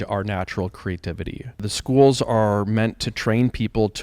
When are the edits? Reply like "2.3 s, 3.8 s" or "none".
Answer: 1.7 s